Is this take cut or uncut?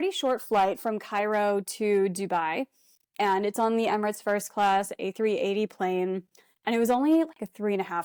uncut